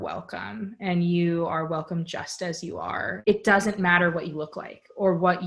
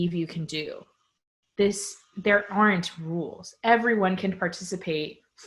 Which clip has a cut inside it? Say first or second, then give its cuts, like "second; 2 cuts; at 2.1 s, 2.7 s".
first; 1 cut; at 3.1 s